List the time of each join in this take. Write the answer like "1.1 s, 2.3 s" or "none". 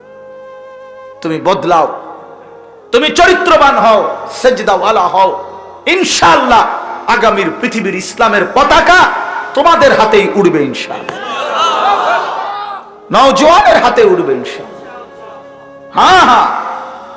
1.2 s